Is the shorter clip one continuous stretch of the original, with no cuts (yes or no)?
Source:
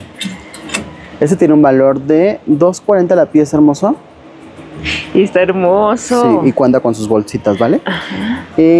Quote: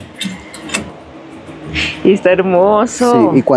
no